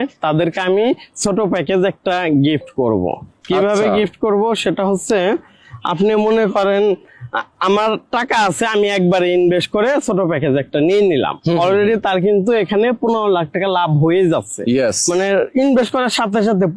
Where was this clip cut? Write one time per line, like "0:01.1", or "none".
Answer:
none